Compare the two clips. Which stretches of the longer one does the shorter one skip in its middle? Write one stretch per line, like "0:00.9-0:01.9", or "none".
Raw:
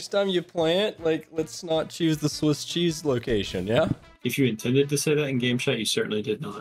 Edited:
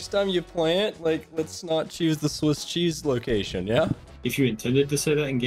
none